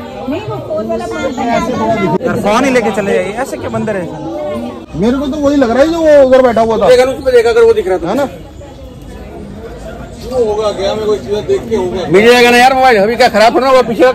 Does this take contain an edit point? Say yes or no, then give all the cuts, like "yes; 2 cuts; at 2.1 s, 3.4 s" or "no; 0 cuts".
yes; 2 cuts; at 2.2 s, 4.9 s